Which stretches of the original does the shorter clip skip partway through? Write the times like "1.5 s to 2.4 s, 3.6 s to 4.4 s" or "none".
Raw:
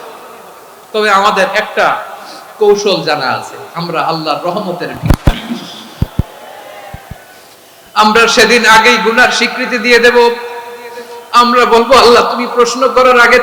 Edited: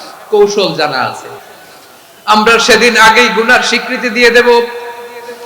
3.6 s to 7.0 s

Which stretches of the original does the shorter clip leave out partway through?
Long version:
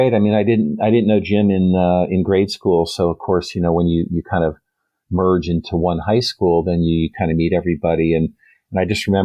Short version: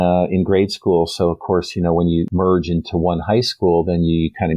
4.1 s to 5.1 s

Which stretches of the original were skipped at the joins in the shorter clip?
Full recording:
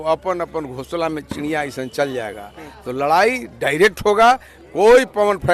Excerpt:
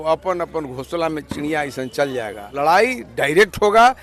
2.5 s to 2.9 s

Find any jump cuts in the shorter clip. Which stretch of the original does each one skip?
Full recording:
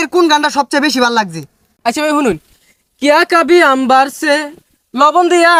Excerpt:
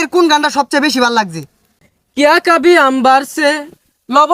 1.7 s to 2.5 s

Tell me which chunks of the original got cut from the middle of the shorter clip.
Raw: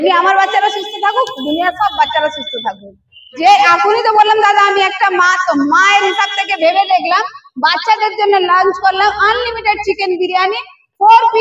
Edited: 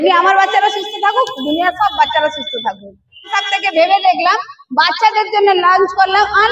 3.3 s to 6.2 s

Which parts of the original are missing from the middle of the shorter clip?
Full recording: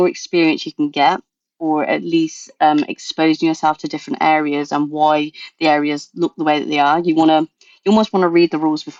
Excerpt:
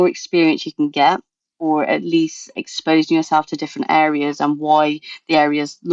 2.5 s to 2.9 s

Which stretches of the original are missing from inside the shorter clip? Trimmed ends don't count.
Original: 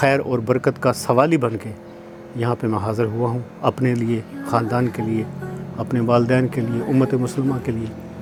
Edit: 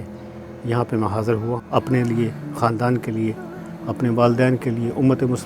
3.3 s to 3.5 s

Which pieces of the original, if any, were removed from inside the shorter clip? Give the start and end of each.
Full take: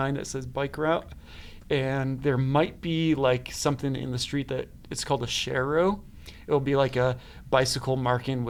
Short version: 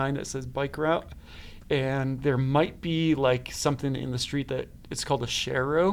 none

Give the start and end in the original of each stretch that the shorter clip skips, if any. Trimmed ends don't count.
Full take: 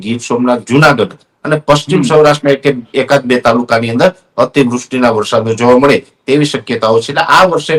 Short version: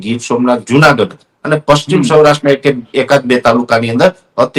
none

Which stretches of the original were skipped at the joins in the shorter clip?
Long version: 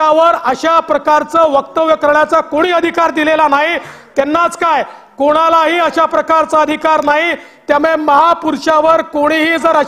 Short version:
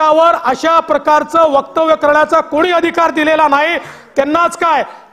none

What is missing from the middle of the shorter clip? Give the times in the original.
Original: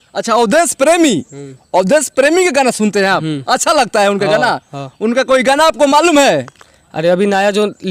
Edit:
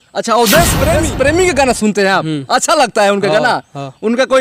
1.0 s to 1.9 s

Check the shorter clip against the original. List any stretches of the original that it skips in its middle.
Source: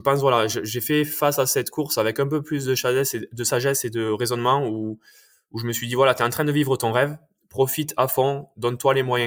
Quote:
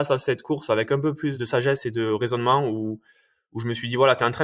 2.6 s to 3.3 s

